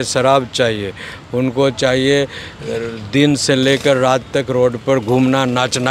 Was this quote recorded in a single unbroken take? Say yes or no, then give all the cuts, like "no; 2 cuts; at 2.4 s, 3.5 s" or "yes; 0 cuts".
yes; 0 cuts